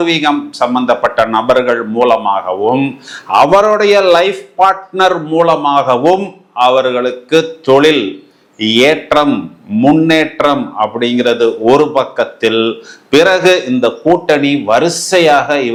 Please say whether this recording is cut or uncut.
uncut